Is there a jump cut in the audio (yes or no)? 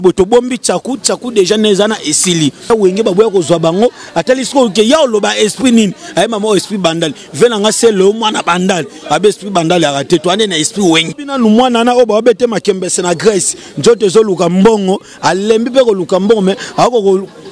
yes